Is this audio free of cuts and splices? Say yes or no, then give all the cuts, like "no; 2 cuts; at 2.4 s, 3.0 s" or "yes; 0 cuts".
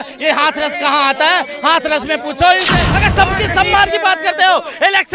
no; 1 cut; at 2.9 s